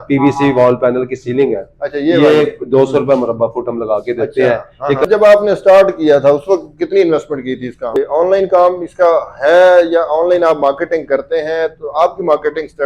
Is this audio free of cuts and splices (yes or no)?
no